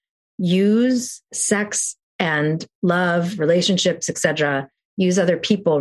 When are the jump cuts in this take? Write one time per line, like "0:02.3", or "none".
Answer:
0:01.3